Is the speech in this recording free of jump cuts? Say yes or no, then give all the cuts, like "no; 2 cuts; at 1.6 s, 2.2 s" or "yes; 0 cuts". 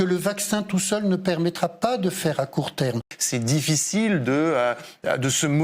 yes; 0 cuts